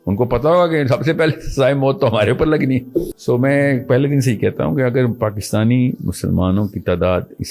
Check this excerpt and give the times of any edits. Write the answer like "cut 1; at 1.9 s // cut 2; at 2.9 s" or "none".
cut 1; at 3.1 s